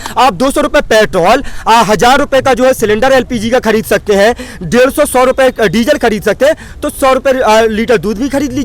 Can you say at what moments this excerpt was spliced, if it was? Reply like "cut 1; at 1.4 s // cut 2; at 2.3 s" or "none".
none